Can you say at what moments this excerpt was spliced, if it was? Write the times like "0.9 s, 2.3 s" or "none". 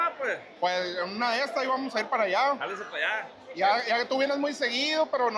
none